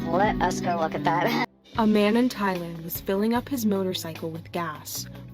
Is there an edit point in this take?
yes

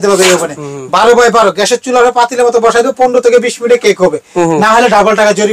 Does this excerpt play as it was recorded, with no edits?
yes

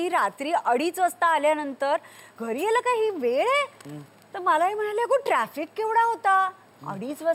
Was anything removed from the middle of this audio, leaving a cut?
yes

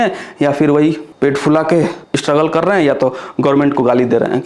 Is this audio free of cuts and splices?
yes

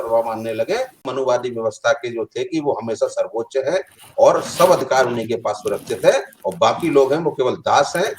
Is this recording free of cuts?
no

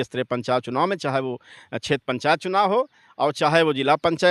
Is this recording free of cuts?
yes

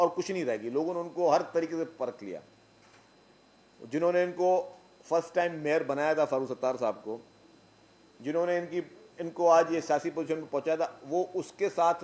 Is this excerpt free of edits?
yes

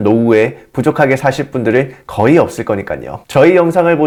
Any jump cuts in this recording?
no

